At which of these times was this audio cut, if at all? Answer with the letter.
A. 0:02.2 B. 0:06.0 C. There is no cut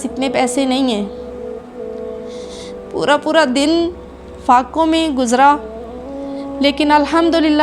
C